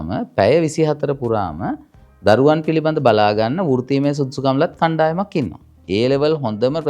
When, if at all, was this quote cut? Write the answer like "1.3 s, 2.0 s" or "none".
5.7 s